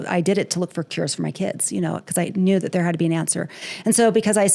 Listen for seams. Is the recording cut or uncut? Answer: uncut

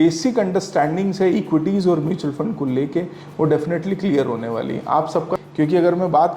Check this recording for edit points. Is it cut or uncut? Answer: cut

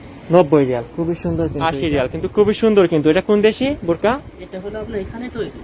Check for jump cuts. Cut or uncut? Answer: cut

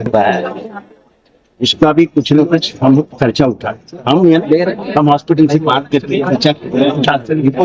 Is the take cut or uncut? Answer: uncut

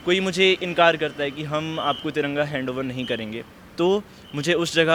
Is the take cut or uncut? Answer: uncut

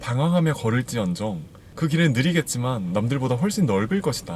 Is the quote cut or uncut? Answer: uncut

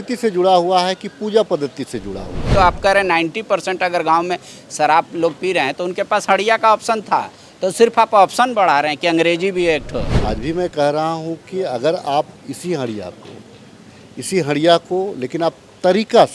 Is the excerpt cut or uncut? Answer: cut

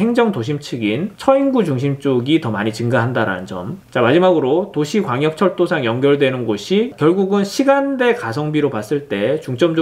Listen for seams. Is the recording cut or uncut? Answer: cut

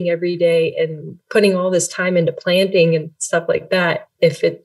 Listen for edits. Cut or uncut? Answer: uncut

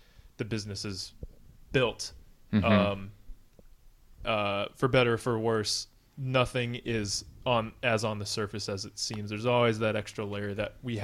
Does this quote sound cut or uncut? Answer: uncut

